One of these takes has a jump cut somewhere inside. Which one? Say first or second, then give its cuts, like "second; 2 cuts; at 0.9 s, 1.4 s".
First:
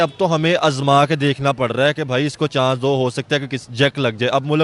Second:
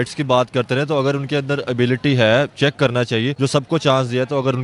second; 1 cut; at 3.3 s